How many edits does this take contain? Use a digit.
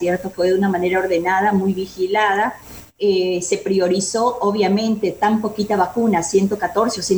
0